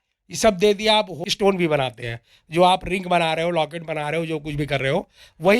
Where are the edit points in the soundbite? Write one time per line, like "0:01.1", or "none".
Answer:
0:01.2